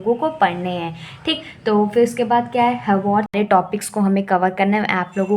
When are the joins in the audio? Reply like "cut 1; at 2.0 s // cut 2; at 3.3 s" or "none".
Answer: cut 1; at 3.3 s